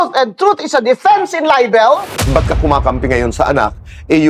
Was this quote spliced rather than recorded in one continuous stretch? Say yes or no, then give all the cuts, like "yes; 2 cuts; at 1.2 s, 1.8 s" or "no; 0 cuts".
yes; 1 cut; at 2.2 s